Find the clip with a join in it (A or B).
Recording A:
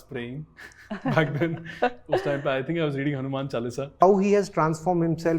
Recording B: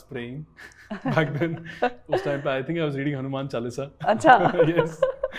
A